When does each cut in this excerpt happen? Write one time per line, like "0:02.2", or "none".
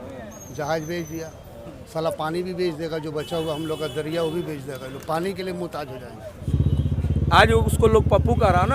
0:06.5

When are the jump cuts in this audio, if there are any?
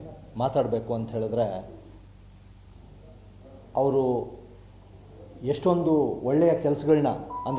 none

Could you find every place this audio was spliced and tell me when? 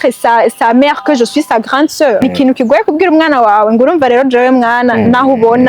0:02.2

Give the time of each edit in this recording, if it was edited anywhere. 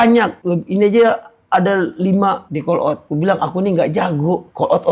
0:02.4

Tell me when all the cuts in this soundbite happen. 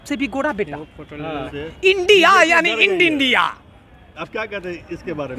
0:01.5

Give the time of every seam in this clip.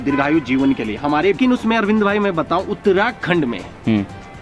0:01.4

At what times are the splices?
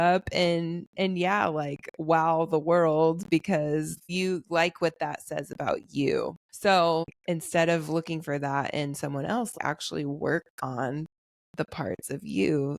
0:04.0
0:06.4
0:07.1
0:09.5

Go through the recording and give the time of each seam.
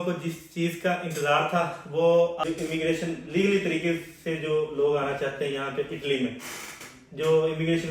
0:02.4

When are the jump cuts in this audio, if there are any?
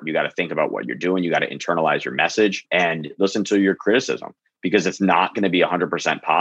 0:02.6

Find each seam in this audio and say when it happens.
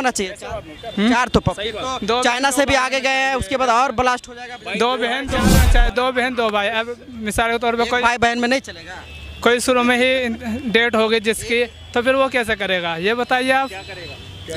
0:05.5

